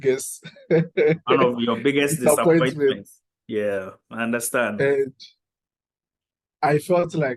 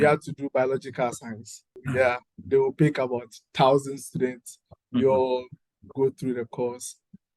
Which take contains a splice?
second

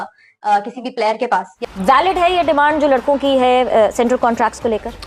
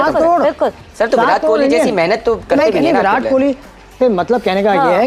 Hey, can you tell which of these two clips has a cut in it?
first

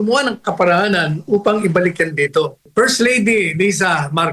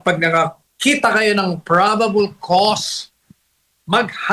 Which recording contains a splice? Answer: first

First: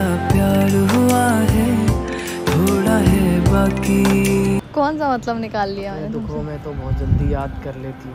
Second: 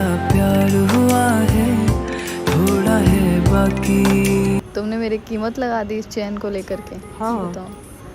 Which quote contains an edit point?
second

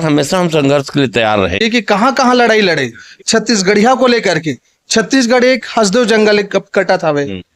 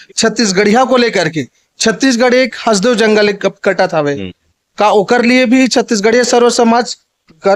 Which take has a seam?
first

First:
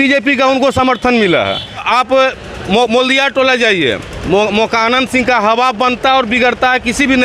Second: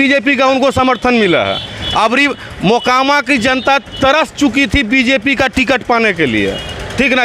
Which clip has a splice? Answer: first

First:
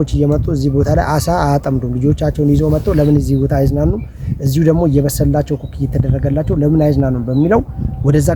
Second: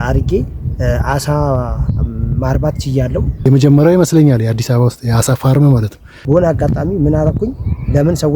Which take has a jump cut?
second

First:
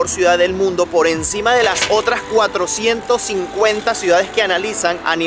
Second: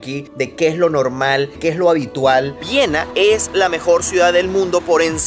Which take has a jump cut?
second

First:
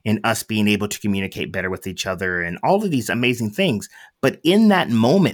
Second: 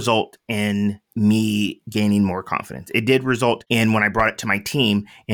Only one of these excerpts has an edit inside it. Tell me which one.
second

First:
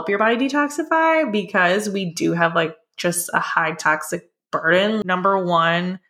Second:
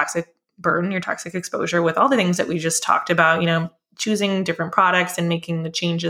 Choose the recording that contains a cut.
first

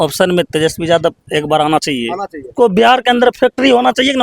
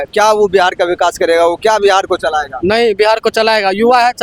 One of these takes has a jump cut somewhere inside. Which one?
first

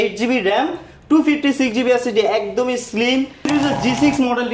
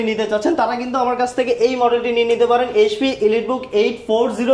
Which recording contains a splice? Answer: first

